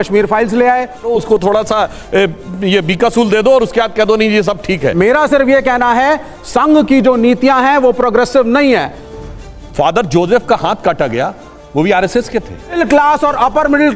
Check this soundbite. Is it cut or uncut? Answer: cut